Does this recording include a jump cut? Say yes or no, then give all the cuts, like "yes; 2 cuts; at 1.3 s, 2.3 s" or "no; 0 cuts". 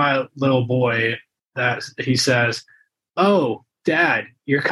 no; 0 cuts